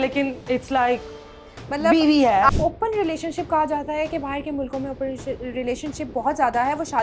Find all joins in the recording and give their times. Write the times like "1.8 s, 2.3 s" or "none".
2.5 s